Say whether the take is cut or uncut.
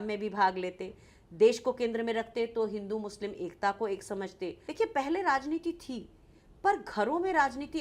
cut